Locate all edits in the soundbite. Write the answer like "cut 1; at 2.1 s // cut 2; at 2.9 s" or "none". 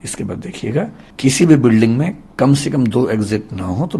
cut 1; at 1.0 s